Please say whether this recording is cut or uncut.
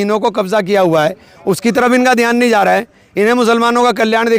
cut